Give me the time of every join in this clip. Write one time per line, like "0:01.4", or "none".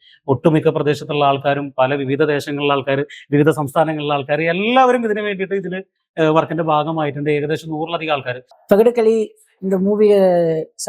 0:08.5